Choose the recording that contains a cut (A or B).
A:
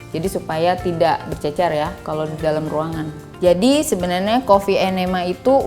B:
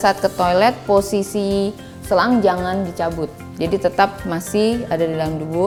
A